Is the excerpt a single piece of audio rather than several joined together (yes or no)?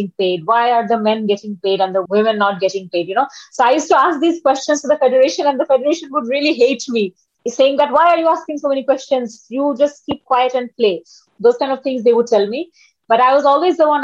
no